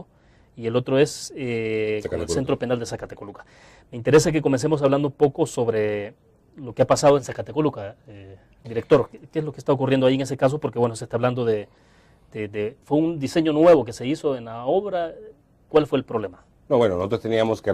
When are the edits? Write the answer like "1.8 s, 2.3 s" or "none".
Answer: 9.2 s